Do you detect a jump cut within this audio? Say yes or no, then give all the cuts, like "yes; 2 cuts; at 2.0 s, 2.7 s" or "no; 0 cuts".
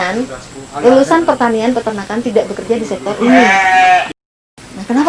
no; 0 cuts